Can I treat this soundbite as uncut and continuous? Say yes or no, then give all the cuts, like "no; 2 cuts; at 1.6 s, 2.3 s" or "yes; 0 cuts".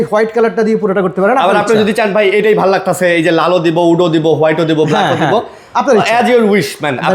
yes; 0 cuts